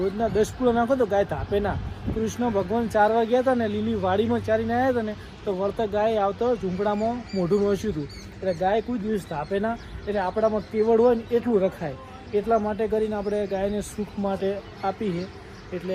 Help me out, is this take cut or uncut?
uncut